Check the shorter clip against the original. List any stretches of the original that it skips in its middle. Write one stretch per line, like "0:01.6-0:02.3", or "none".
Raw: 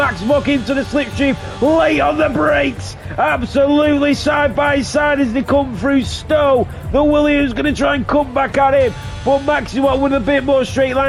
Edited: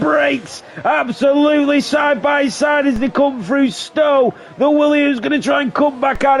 none